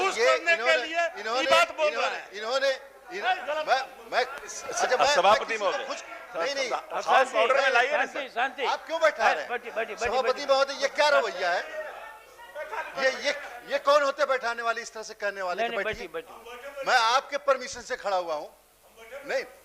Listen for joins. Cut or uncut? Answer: uncut